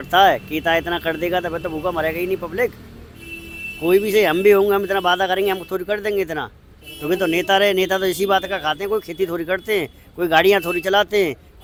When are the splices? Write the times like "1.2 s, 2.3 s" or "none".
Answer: none